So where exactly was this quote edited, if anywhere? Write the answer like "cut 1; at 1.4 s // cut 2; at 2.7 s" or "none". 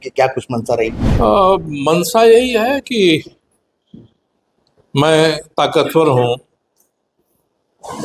cut 1; at 1.0 s

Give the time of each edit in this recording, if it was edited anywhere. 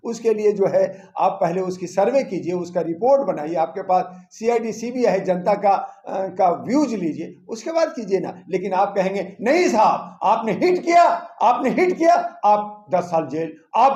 none

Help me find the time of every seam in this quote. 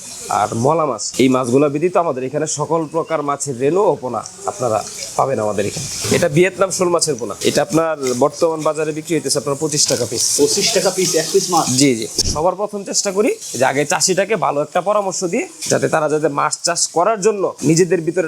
cut 1; at 5.9 s // cut 2; at 7.3 s // cut 3; at 12.2 s

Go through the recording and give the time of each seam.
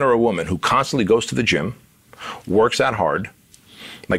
none

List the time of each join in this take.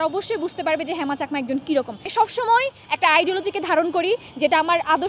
cut 1; at 2.1 s

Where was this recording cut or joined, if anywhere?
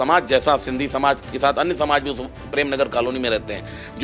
none

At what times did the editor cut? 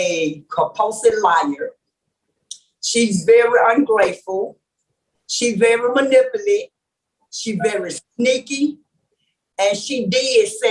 none

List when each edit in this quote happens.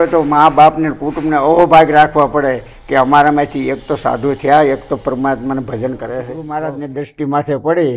cut 1; at 6.4 s

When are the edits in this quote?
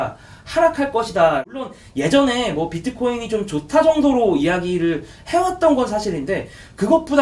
cut 1; at 1.7 s

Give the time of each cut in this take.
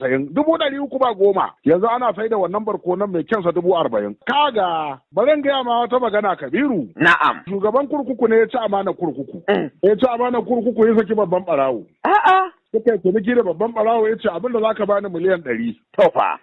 cut 1; at 4.1 s // cut 2; at 7.5 s // cut 3; at 9.3 s

